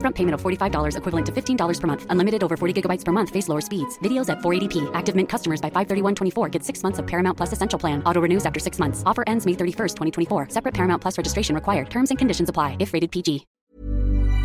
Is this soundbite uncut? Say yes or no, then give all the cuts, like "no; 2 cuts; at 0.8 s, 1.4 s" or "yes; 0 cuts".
no; 1 cut; at 13.5 s